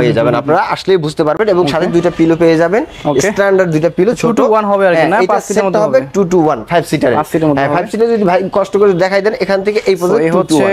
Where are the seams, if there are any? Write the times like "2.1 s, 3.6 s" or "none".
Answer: none